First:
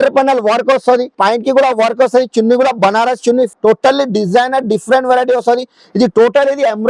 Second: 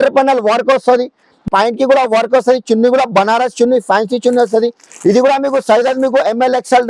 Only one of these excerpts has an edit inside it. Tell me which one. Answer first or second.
first